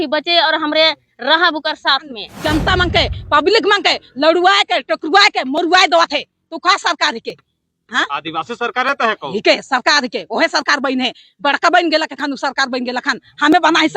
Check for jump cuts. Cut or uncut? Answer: cut